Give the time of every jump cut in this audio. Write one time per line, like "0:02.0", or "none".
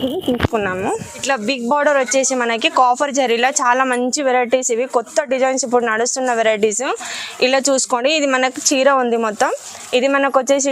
0:01.2